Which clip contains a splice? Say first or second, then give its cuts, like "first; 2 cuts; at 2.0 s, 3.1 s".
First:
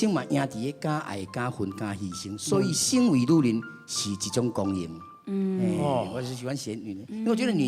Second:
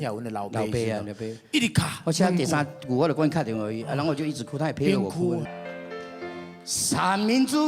second; 1 cut; at 5.5 s